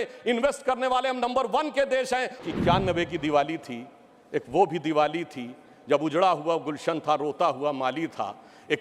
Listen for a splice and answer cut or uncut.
cut